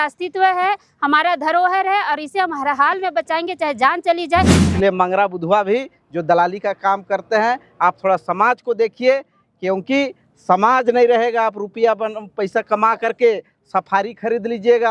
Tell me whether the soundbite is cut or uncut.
cut